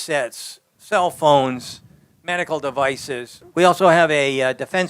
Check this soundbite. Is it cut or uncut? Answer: cut